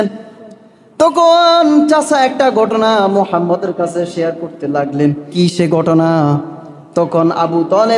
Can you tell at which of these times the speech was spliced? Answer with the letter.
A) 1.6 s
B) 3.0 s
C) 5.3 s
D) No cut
C